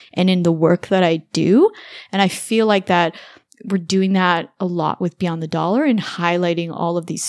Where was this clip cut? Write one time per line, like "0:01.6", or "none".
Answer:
none